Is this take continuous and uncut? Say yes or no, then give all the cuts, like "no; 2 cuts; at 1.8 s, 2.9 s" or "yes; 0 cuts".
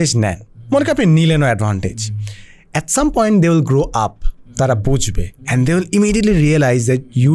yes; 0 cuts